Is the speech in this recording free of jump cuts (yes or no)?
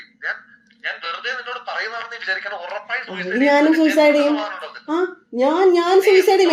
yes